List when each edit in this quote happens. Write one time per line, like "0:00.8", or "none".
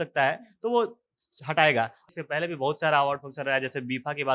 0:02.1